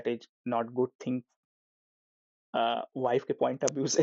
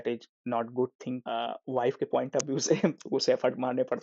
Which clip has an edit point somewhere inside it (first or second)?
second